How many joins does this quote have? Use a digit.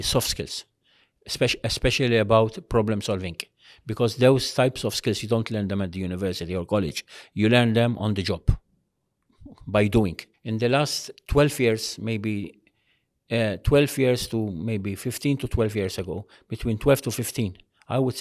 1